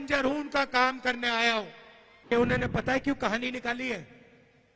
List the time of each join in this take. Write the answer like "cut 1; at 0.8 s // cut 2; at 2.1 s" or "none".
cut 1; at 2.3 s